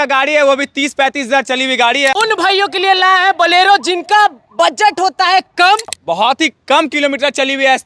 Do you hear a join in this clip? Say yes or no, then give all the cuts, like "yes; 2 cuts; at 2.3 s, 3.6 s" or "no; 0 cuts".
yes; 2 cuts; at 2.1 s, 6.0 s